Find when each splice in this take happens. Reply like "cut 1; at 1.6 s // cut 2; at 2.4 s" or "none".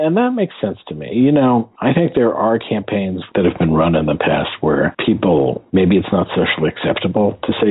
cut 1; at 3.2 s // cut 2; at 5.6 s